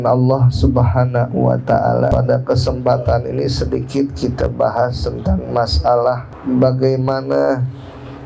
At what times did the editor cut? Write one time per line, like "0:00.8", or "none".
0:02.1
0:06.3